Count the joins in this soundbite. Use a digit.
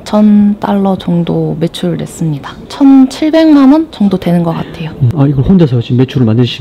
2